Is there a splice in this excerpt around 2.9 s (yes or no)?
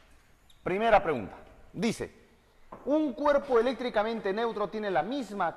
no